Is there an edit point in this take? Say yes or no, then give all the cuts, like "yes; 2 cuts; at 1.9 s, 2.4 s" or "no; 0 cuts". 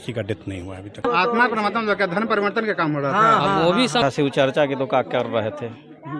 yes; 2 cuts; at 1.0 s, 4.0 s